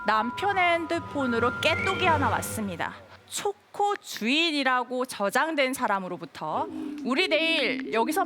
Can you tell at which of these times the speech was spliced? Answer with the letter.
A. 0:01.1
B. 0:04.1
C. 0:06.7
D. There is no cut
C